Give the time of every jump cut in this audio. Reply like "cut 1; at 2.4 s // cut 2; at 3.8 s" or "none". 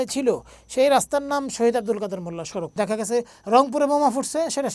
cut 1; at 2.7 s